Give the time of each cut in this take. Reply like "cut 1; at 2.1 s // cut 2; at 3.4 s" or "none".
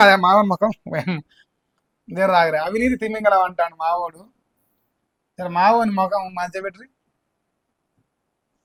none